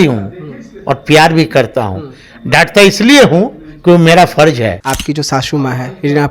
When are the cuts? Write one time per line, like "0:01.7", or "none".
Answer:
0:04.8